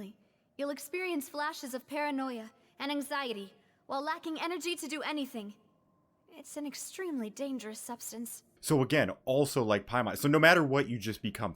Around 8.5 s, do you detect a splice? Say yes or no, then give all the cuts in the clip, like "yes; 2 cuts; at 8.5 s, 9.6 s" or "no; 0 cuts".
yes; 1 cut; at 8.5 s